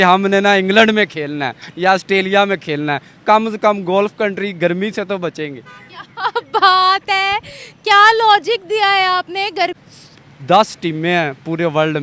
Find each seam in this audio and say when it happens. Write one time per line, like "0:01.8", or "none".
0:09.8